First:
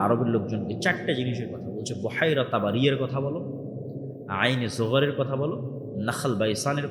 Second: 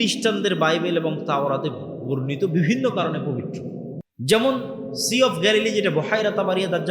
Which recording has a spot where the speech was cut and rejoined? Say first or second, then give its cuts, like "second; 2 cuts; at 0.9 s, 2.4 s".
second; 1 cut; at 4.0 s